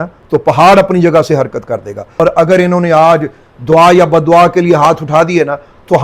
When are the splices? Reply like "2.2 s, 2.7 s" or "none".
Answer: 2.2 s